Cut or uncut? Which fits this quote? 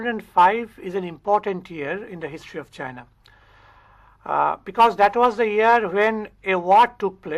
cut